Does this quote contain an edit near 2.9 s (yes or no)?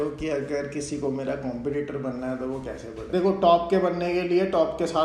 yes